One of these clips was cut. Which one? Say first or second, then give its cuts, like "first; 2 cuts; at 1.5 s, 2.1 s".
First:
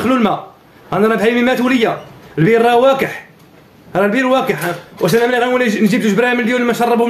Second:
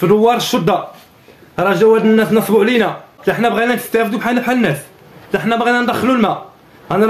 second; 1 cut; at 3.1 s